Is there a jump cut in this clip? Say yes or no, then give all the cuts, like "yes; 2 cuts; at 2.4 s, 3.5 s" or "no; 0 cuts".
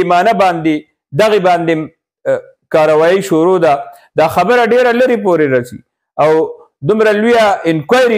no; 0 cuts